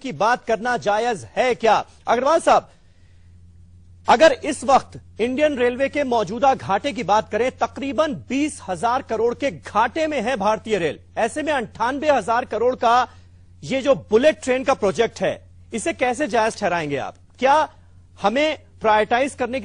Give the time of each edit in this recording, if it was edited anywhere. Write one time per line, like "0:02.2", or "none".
0:13.1